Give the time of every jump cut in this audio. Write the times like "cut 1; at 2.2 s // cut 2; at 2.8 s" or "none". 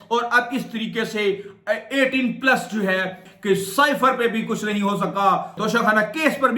cut 1; at 3.2 s // cut 2; at 5.6 s